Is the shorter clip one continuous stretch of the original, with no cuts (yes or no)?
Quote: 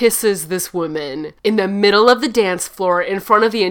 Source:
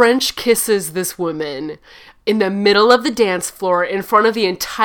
no